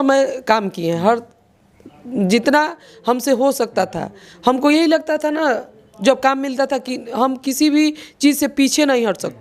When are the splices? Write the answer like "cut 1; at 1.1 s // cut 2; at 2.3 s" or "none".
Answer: none